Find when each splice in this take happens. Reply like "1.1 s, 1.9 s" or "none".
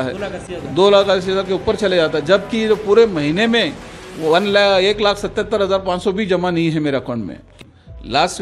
7.5 s